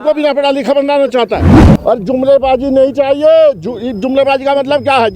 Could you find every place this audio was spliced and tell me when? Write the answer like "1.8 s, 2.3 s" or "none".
1.7 s